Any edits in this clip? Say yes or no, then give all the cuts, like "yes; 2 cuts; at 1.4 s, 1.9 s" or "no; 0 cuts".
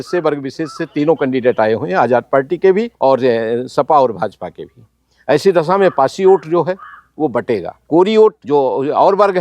yes; 3 cuts; at 2.9 s, 7.7 s, 8.4 s